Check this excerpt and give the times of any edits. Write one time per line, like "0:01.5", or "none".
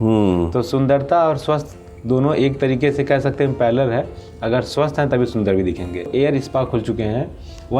0:06.1